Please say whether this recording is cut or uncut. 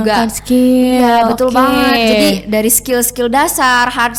uncut